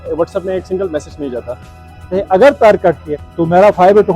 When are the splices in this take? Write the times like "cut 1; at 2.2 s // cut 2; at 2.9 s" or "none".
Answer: cut 1; at 2.1 s // cut 2; at 3.1 s